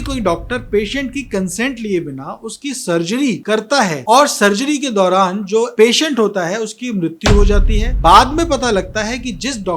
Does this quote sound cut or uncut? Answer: cut